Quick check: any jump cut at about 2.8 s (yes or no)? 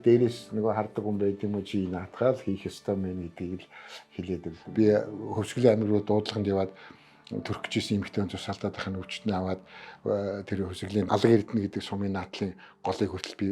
no